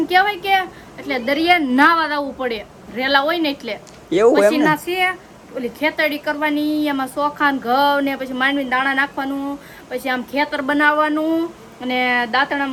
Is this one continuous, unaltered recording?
yes; 0 cuts

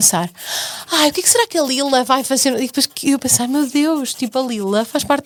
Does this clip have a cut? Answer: no; 0 cuts

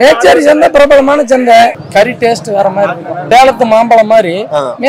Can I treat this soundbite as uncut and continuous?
no; 2 cuts; at 1.8 s, 3.1 s

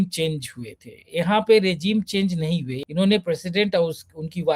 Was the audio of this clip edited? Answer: yes; 1 cut; at 2.8 s

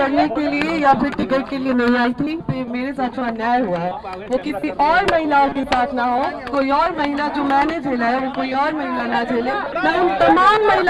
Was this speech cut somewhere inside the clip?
yes; 2 cuts; at 2.4 s, 9.7 s

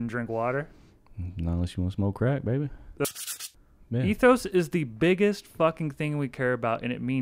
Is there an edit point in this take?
yes; 1 cut; at 3.2 s

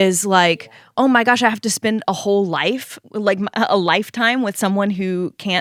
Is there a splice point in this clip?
no; 0 cuts

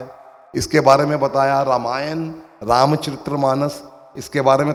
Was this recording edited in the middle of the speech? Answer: no; 0 cuts

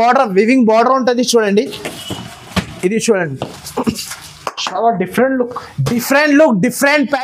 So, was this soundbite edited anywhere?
no; 0 cuts

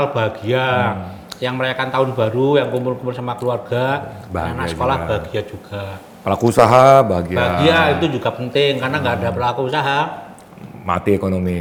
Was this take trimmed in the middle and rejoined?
no; 0 cuts

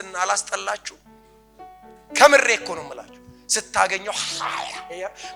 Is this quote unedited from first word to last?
yes; 0 cuts

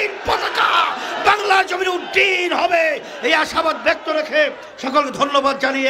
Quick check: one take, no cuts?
yes; 0 cuts

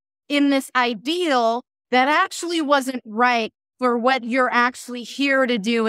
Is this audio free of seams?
yes; 0 cuts

